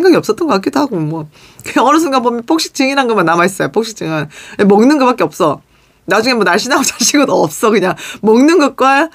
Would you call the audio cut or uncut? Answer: uncut